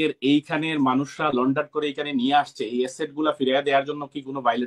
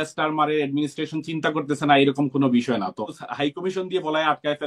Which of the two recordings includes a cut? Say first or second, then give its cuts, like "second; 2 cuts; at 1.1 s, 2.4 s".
second; 1 cut; at 3.2 s